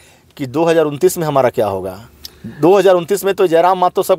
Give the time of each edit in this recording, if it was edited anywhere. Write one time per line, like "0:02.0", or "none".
none